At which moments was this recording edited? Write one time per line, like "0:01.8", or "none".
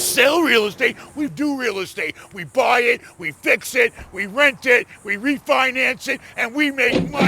0:01.3

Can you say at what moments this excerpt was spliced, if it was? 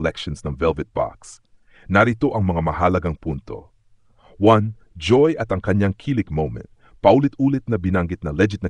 none

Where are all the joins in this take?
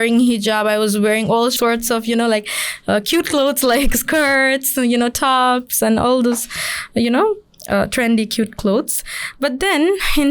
0:01.5

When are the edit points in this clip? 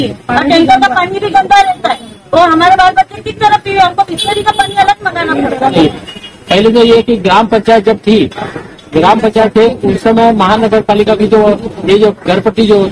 0:05.7

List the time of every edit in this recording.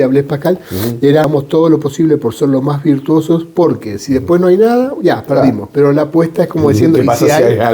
0:01.3

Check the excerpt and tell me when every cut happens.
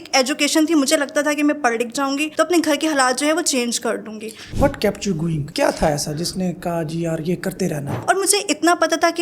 0:04.4
0:08.0

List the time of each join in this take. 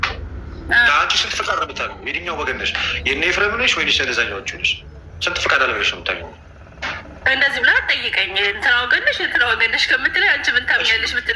none

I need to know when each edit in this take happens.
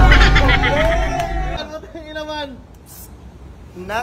0:01.6

